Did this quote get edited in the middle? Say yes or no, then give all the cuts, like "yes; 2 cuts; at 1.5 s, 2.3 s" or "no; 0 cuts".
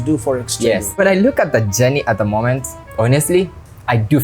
yes; 1 cut; at 1.0 s